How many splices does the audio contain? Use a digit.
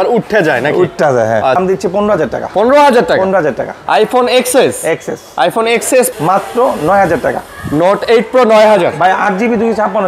2